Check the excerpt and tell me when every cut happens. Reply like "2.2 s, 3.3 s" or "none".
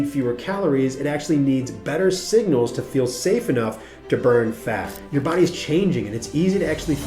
5.0 s